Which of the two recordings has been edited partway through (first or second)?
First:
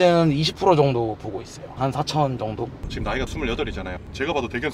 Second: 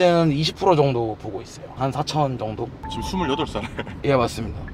first